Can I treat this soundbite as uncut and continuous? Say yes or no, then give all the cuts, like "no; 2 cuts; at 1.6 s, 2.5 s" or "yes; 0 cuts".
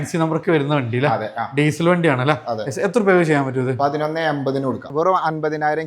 no; 1 cut; at 4.9 s